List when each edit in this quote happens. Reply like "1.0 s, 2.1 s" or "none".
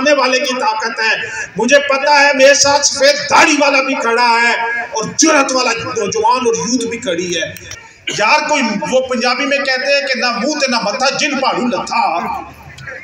7.6 s